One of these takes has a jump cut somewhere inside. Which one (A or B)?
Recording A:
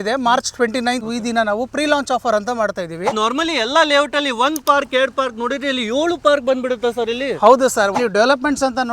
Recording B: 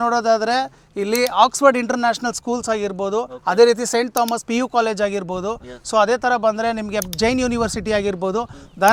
A